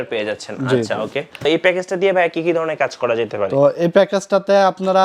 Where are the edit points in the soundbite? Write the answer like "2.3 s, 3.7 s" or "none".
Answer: 1.4 s